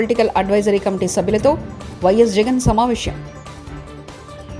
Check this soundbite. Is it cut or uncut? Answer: uncut